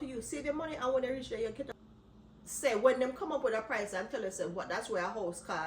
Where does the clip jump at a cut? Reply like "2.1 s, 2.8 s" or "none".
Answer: 1.7 s